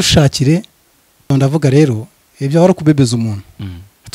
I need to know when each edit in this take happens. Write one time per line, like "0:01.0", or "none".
0:01.3